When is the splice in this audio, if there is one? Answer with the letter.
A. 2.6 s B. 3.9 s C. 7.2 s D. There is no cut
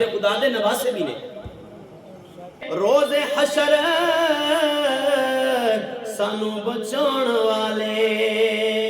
A